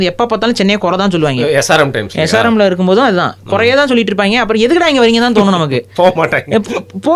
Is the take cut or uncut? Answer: uncut